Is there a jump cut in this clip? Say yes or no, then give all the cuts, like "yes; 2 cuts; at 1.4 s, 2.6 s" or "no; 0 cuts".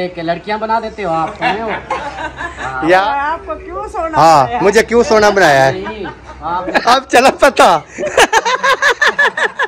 yes; 2 cuts; at 3.0 s, 6.8 s